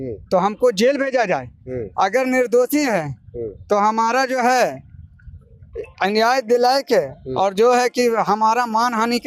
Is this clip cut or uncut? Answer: uncut